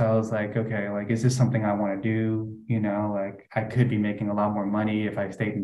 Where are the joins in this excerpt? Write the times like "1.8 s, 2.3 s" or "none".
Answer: none